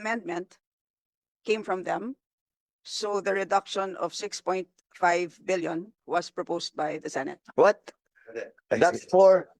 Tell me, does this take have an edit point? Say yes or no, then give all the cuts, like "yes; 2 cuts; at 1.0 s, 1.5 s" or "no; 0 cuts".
no; 0 cuts